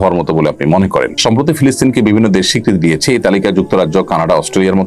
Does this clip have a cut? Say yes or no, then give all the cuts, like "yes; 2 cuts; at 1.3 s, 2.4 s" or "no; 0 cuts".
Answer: yes; 1 cut; at 1.1 s